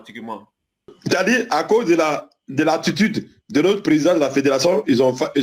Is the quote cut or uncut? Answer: cut